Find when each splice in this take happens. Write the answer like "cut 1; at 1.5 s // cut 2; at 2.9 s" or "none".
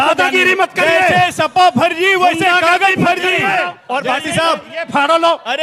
cut 1; at 3.8 s